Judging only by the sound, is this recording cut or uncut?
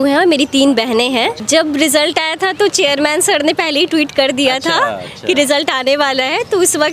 cut